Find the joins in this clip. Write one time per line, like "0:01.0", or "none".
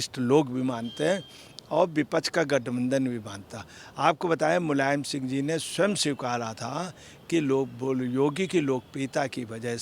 none